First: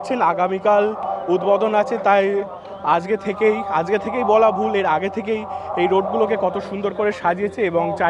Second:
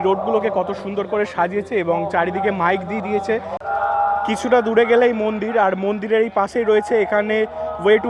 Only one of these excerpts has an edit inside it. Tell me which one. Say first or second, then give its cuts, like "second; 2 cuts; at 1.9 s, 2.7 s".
second; 1 cut; at 3.6 s